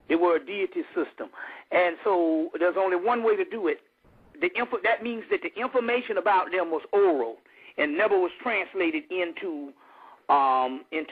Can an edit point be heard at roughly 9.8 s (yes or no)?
no